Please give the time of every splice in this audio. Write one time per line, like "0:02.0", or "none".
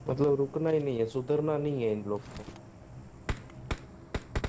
none